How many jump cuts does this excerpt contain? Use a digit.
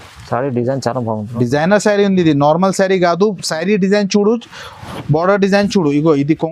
0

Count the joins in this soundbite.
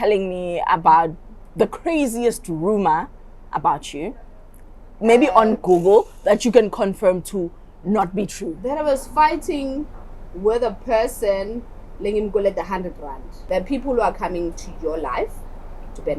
1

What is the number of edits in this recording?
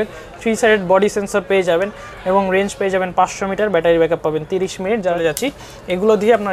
1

